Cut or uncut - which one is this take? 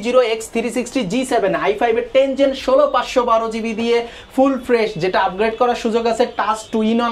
uncut